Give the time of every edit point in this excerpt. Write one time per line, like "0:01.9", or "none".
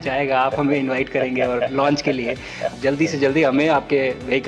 0:02.7